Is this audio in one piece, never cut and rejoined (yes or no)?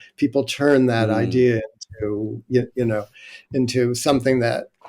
yes